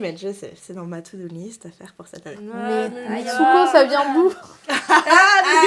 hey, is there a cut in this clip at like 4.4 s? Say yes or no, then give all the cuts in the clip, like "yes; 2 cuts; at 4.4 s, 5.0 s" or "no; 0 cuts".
no; 1 cut; at 2.4 s